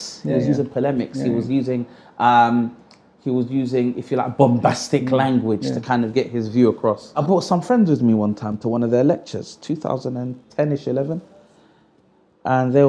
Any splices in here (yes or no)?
yes